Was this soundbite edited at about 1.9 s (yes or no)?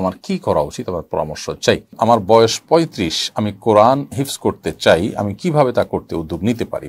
yes